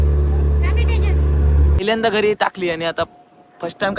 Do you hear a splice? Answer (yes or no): yes